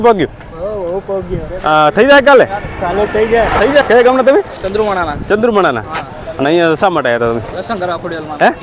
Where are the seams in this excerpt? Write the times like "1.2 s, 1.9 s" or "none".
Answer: 3.8 s